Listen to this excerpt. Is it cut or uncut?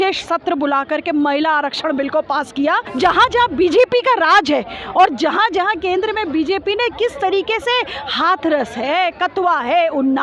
cut